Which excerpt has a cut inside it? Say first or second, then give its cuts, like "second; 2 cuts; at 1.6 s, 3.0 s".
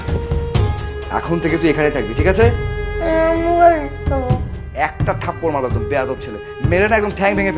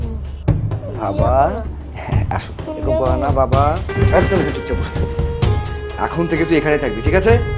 second; 1 cut; at 3.9 s